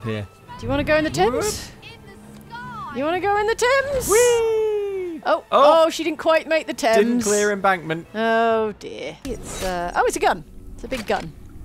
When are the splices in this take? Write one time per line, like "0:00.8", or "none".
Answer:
0:09.1